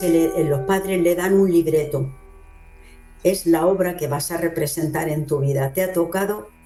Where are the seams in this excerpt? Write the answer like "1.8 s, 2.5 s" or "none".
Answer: none

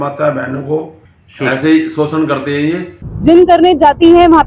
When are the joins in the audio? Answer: 3.0 s

